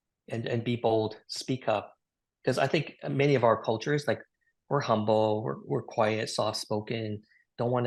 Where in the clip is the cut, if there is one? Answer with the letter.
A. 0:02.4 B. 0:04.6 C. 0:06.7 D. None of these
D